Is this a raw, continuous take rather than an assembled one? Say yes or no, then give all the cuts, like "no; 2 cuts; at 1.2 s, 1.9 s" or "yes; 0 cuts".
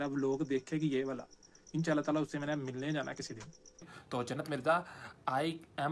no; 1 cut; at 3.9 s